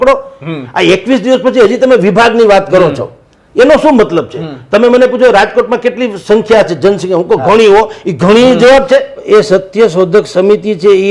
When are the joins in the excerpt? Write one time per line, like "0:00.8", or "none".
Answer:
0:09.2